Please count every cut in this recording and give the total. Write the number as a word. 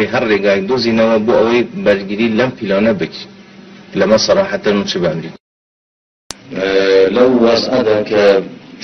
one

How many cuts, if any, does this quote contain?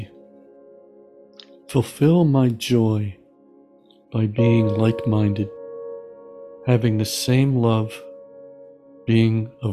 zero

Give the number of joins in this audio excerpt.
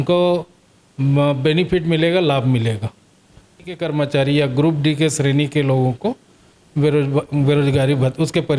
one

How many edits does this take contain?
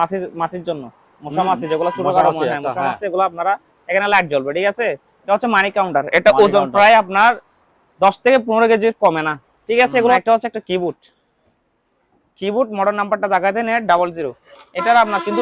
two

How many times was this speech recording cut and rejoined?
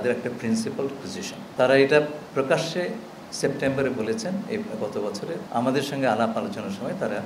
zero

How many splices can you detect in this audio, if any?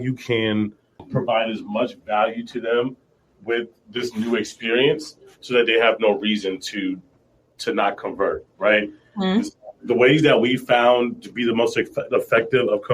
one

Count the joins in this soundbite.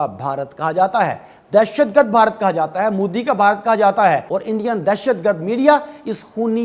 one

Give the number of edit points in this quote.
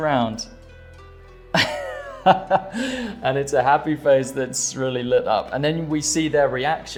zero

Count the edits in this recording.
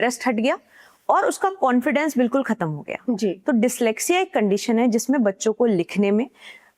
zero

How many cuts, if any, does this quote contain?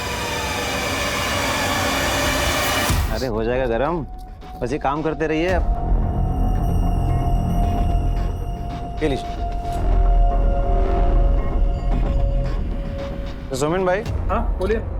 one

